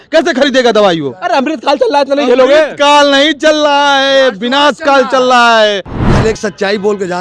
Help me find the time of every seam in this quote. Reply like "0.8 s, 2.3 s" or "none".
5.9 s

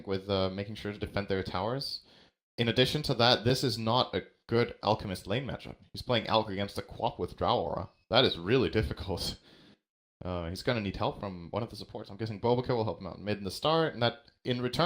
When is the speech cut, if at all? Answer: 13.9 s

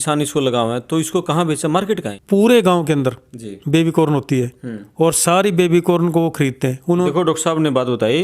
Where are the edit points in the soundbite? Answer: 2.1 s, 7.1 s

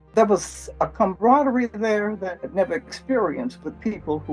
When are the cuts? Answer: 0.9 s, 2.4 s

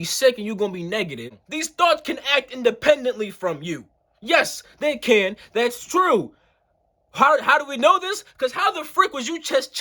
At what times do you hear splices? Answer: 1.4 s

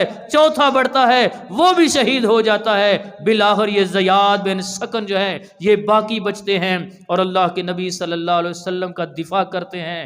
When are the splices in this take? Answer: none

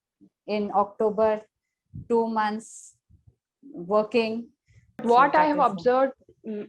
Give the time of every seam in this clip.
5.0 s

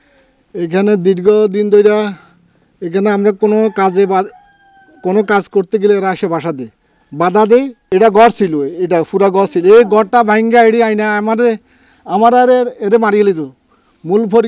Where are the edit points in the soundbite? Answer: 7.8 s

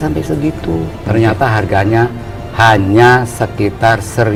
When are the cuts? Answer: none

